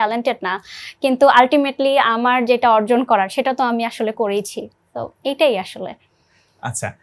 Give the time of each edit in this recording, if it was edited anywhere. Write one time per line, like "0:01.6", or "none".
none

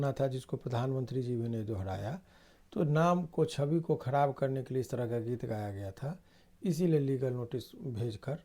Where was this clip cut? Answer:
none

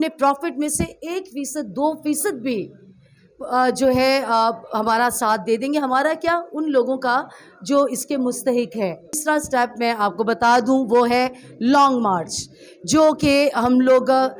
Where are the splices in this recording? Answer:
0:09.2

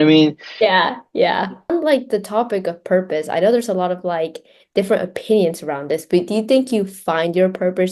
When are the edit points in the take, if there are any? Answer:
0:01.7

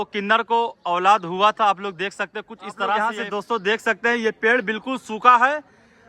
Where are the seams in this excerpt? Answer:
0:03.2

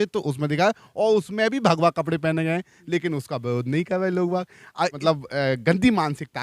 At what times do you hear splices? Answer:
0:05.0

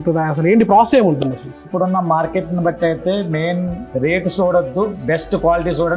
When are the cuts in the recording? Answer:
0:01.7
0:03.8

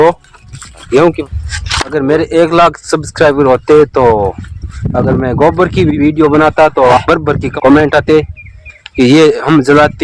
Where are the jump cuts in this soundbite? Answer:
0:01.2

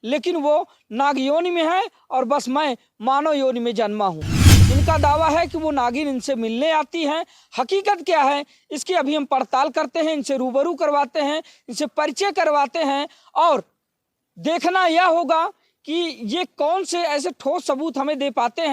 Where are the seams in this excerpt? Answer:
0:04.5

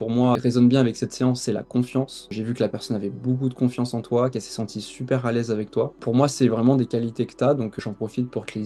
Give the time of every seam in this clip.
none

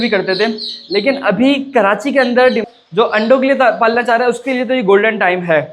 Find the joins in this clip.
0:02.7

